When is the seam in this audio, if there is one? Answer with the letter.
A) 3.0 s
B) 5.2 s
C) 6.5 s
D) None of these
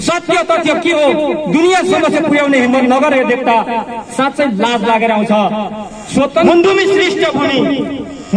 C